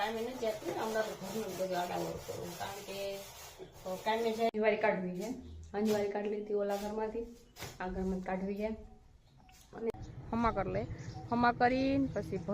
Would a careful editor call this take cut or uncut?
cut